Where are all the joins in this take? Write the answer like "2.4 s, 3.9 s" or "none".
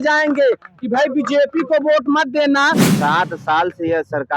2.9 s